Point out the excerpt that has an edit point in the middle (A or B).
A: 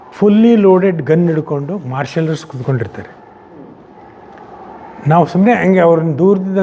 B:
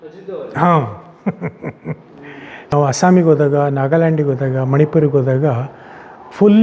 B